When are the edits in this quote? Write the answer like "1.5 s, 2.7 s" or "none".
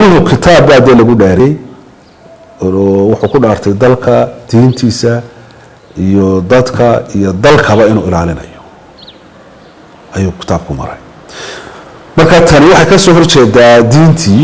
1.4 s